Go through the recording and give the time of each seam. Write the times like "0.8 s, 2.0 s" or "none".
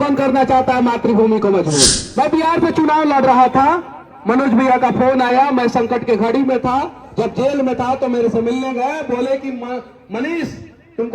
2.0 s

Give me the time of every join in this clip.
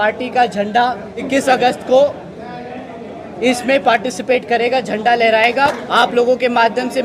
1.3 s, 5.5 s

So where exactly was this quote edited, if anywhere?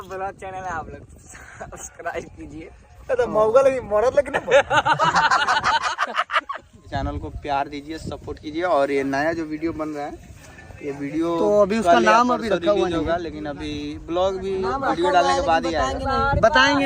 6.9 s

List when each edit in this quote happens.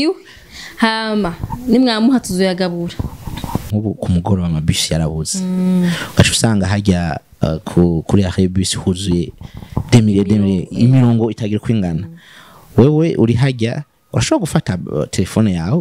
3.7 s

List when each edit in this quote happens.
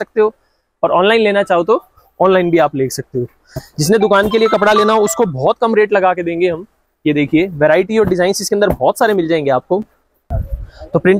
none

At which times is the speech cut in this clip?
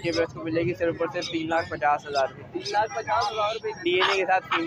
none

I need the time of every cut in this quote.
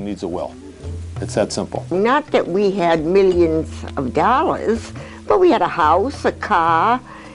1.9 s

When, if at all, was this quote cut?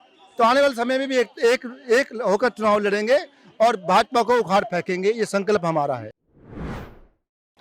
none

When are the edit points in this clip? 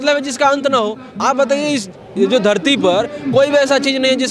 none

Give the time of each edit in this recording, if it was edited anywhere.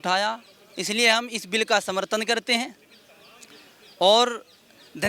none

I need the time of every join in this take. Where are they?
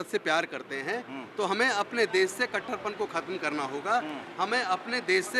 none

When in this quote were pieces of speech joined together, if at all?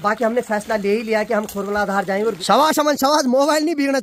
2.4 s

